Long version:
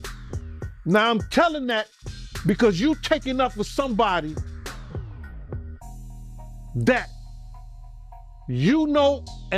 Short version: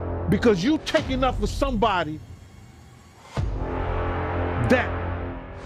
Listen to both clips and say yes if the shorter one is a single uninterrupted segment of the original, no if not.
yes